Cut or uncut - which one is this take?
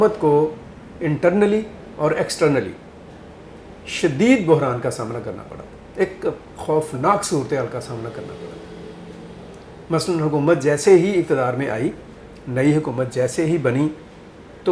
uncut